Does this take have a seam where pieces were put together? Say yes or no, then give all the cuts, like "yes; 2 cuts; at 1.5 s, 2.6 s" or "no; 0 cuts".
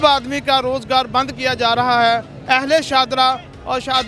no; 0 cuts